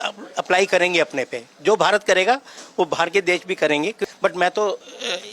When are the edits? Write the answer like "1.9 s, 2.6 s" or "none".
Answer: 4.1 s